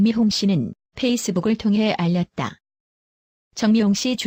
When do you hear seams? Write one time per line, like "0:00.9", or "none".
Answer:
none